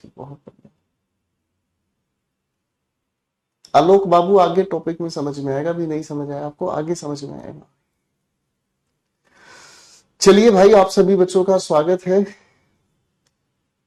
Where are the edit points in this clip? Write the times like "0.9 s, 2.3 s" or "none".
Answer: none